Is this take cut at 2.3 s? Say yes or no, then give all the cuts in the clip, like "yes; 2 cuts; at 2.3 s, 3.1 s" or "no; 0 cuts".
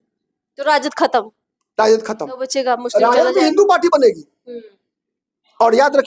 yes; 1 cut; at 2.3 s